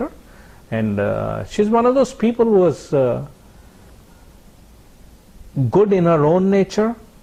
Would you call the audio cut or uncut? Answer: uncut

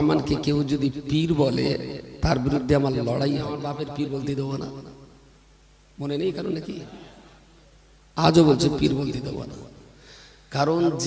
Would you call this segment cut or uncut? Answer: cut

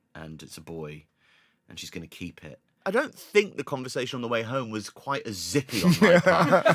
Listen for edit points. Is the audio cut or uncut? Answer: cut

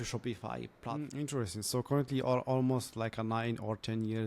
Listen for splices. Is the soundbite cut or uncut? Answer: cut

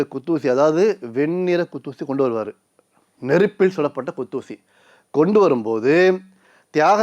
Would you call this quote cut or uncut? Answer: uncut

